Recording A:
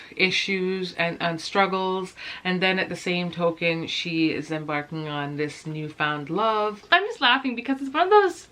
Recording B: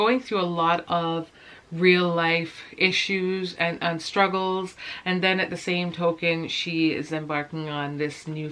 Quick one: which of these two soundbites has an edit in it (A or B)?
A